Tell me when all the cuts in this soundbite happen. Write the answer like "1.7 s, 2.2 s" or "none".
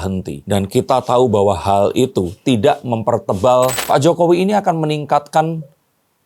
3.8 s